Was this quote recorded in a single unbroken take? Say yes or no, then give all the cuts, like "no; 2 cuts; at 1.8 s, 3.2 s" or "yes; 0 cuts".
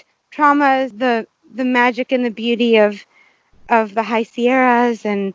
no; 1 cut; at 0.9 s